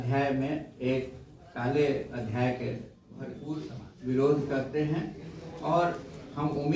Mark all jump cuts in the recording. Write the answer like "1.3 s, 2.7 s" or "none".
3.4 s